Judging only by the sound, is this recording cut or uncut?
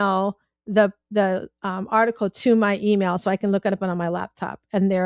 uncut